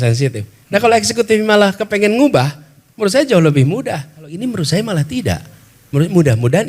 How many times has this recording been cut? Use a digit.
1